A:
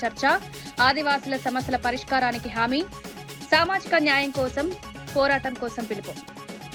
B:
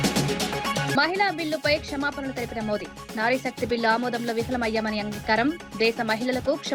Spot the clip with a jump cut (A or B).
B